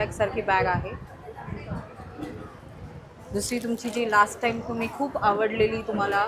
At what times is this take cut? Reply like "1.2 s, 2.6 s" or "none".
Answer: none